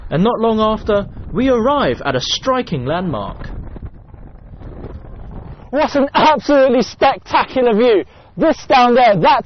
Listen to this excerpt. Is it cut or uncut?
cut